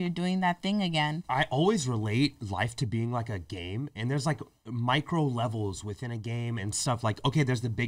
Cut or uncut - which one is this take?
cut